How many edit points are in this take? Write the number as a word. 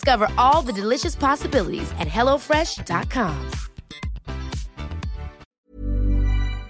one